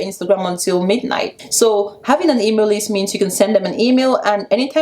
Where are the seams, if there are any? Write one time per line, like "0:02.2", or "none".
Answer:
0:01.4